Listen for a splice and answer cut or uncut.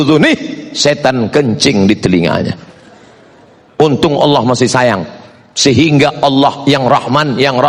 uncut